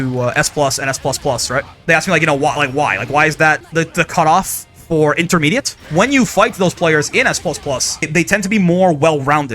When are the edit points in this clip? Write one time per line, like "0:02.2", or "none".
0:01.7
0:03.6
0:05.7
0:08.1